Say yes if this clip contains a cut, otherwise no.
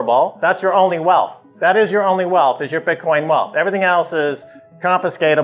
yes